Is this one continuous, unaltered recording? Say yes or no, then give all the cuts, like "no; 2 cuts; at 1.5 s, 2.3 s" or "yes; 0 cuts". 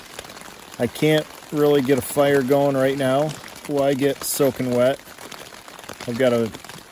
no; 2 cuts; at 3.5 s, 5.8 s